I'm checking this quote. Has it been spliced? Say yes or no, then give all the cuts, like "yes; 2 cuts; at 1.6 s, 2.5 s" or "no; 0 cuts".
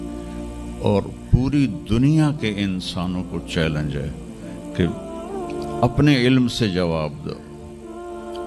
no; 0 cuts